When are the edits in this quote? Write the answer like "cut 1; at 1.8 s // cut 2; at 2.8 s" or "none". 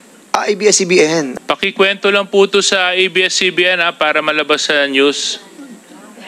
cut 1; at 1.4 s

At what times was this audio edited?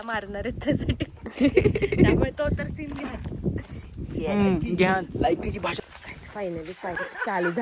cut 1; at 5.9 s

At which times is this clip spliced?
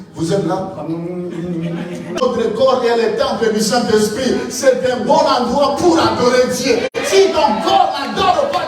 cut 1; at 2.2 s

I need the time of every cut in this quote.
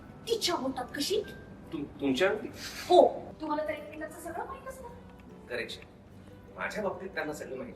cut 1; at 3.3 s

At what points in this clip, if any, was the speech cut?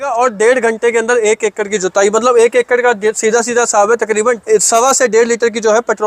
cut 1; at 4.4 s

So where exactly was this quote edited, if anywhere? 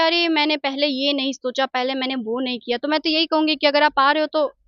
none

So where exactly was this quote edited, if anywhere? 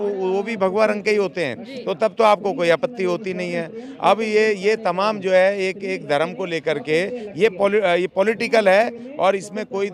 none

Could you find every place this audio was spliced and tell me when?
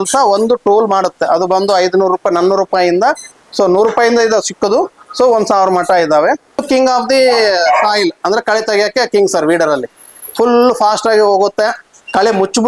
cut 1; at 6.6 s

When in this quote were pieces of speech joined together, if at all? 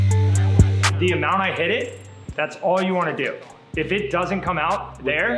cut 1; at 1.0 s

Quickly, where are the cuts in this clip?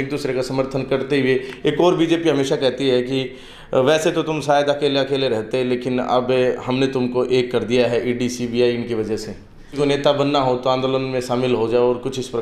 cut 1; at 9.7 s

